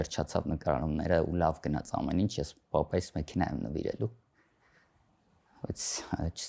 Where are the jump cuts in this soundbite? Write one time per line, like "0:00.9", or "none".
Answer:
none